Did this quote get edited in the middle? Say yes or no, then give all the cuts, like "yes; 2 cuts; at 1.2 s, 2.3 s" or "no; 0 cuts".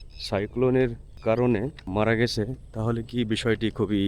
yes; 2 cuts; at 1.1 s, 1.8 s